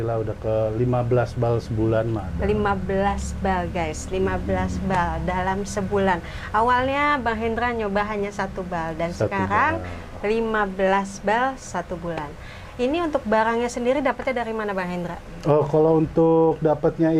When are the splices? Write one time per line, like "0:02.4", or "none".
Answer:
none